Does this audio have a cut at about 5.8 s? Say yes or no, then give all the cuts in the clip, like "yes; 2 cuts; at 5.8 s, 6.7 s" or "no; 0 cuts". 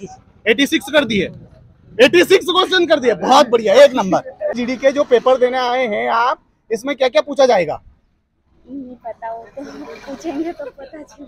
no; 1 cut; at 4.5 s